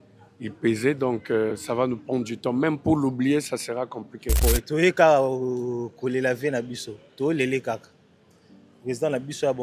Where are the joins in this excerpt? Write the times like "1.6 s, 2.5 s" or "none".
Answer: 4.4 s